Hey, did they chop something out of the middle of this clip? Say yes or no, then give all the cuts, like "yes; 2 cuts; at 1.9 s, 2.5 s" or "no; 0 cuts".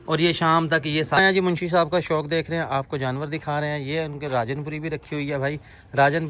yes; 1 cut; at 1.2 s